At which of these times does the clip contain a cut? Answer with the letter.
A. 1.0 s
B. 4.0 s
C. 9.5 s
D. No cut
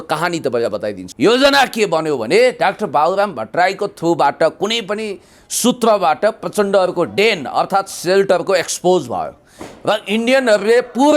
A